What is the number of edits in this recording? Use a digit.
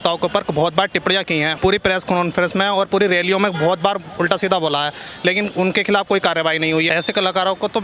2